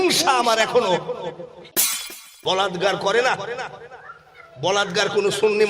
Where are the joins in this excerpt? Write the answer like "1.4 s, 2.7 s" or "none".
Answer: 1.9 s